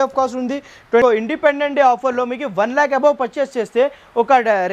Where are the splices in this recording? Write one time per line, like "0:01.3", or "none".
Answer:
0:01.0